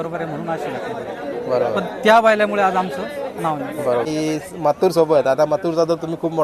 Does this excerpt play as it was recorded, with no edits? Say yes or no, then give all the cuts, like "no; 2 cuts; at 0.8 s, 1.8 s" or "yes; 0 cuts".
no; 1 cut; at 4.1 s